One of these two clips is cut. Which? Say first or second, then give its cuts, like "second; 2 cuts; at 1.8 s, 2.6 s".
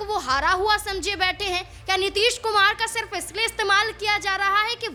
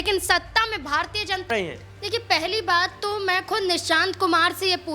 second; 1 cut; at 1.5 s